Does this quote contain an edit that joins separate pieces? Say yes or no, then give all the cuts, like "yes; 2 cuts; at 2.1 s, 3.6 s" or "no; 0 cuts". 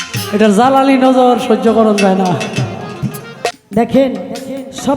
yes; 1 cut; at 3.6 s